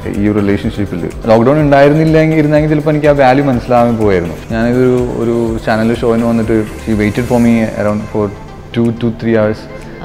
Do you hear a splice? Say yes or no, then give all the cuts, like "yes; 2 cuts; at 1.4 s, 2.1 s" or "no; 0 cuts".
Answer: yes; 3 cuts; at 1.2 s, 4.4 s, 6.8 s